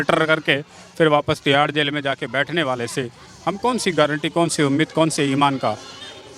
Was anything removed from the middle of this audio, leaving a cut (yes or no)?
no